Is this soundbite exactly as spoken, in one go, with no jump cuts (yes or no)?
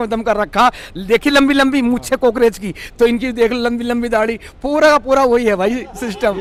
yes